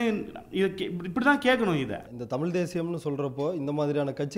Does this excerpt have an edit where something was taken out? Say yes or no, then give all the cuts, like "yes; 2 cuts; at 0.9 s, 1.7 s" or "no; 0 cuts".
yes; 1 cut; at 2.1 s